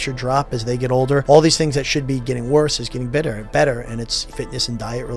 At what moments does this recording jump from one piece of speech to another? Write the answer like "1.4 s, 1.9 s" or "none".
1.2 s, 4.2 s

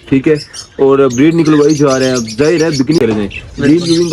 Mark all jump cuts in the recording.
3.0 s

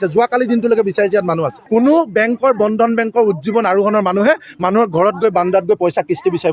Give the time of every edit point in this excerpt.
1.6 s

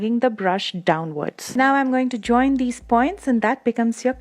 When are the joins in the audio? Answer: 1.4 s

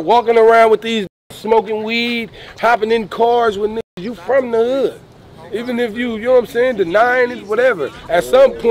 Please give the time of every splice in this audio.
none

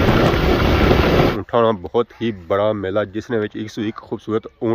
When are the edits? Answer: 1.3 s

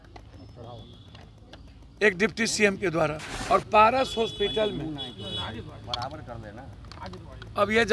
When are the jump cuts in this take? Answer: 3.3 s

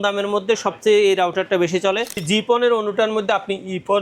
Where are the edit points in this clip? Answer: 2.1 s

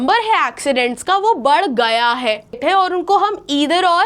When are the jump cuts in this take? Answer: 2.6 s

